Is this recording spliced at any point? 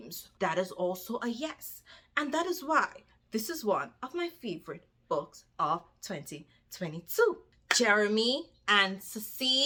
no; 0 cuts

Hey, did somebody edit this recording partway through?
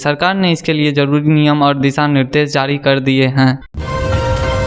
yes; 1 cut; at 3.7 s

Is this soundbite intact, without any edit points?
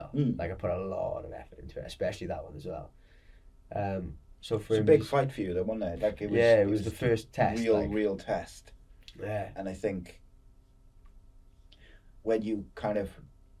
yes; 0 cuts

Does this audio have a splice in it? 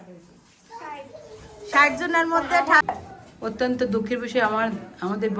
yes; 1 cut; at 2.8 s

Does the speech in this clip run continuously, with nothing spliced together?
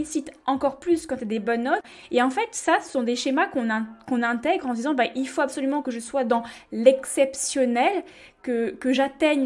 no; 1 cut; at 1.9 s

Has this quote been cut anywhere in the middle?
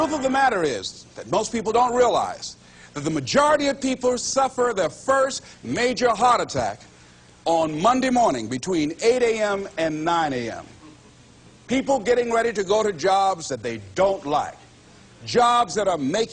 no; 0 cuts

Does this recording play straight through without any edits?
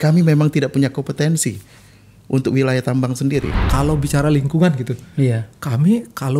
no; 1 cut; at 3.6 s

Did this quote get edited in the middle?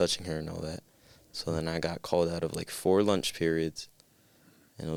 no; 0 cuts

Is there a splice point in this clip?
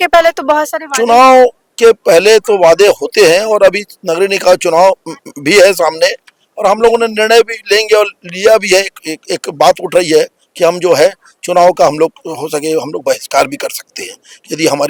no; 0 cuts

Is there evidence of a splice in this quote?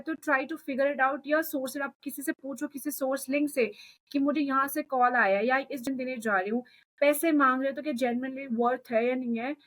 yes; 1 cut; at 5.8 s

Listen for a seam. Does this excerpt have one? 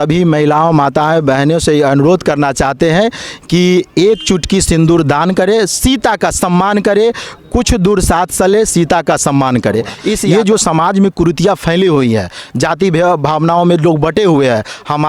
yes; 1 cut; at 10.2 s

